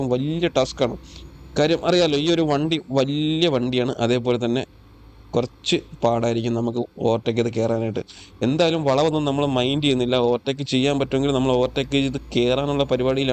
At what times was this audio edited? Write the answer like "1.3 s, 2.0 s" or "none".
none